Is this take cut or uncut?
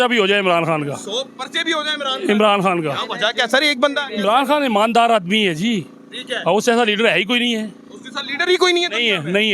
uncut